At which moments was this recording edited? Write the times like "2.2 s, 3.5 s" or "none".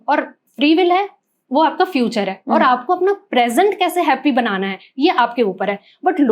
none